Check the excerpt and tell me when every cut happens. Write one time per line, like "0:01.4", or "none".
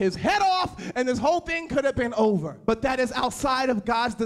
0:02.5